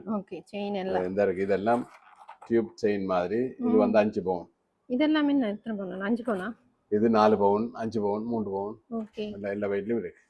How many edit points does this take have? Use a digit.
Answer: 0